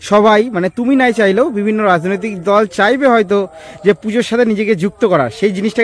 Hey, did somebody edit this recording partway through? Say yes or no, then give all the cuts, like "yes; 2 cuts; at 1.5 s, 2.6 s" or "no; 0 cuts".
no; 0 cuts